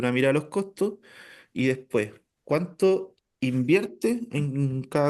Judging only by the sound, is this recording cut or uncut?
cut